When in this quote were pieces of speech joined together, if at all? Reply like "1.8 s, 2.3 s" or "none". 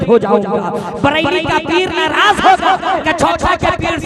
3.0 s